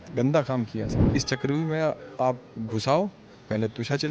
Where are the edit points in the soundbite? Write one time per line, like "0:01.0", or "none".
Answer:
0:01.0